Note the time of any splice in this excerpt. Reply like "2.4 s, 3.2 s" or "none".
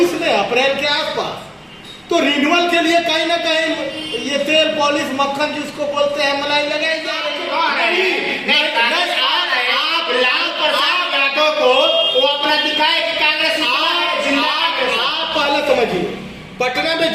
7.1 s